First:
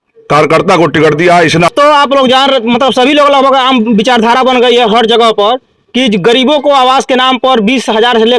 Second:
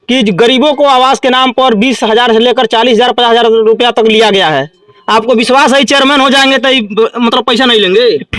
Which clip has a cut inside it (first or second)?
first